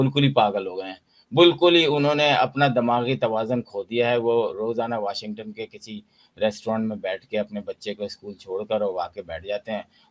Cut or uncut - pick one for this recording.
uncut